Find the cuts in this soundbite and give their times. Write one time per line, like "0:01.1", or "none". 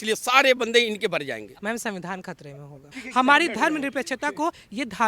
0:01.5
0:03.0

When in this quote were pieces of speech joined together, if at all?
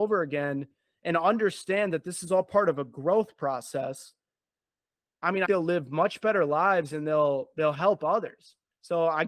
0:05.5

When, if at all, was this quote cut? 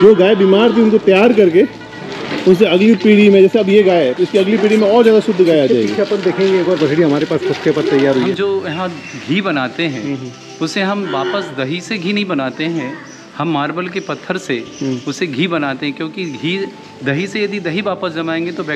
0:08.3

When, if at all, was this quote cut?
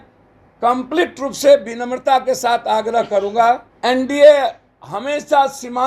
0:03.7

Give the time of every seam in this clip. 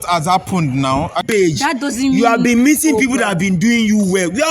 0:01.2

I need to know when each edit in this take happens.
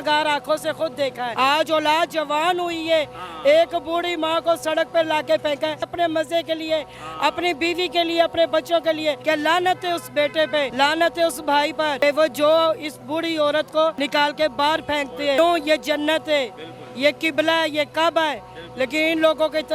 0:01.2
0:05.9
0:09.2
0:10.7
0:12.0
0:14.0
0:15.4

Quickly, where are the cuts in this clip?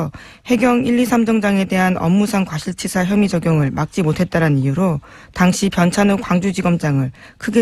none

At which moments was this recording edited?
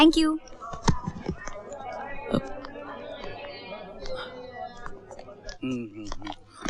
none

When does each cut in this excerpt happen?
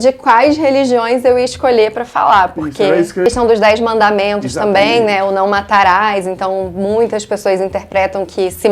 0:03.3

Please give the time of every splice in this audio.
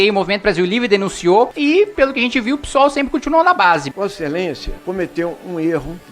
0:03.9

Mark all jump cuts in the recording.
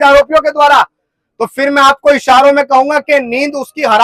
none

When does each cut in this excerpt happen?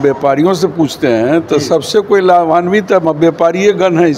none

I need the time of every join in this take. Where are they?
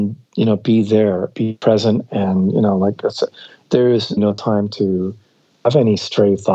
0:04.2
0:05.5

